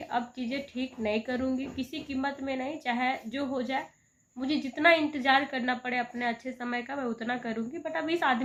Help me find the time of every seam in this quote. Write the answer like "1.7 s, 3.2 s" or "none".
none